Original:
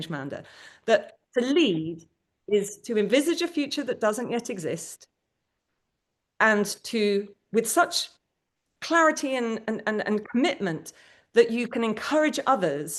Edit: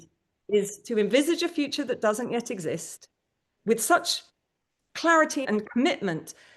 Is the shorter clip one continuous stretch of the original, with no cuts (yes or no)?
no